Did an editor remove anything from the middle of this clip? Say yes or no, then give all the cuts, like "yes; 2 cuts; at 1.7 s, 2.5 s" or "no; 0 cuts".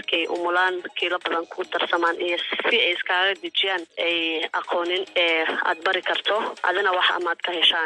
no; 0 cuts